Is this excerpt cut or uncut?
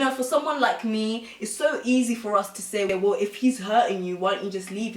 cut